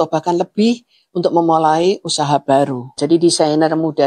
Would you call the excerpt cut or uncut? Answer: cut